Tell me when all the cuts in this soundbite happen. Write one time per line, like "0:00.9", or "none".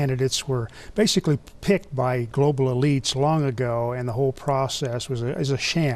none